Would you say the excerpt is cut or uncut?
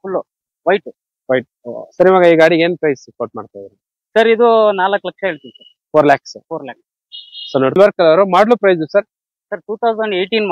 cut